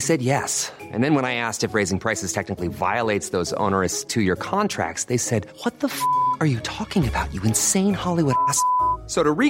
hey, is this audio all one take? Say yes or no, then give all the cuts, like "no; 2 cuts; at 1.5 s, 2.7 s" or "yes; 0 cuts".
yes; 0 cuts